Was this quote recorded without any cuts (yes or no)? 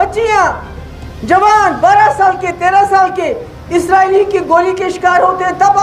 yes